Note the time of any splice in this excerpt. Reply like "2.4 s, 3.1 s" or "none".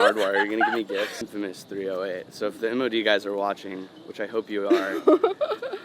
1.2 s